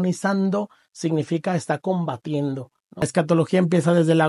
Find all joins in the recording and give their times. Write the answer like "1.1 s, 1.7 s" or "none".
3.1 s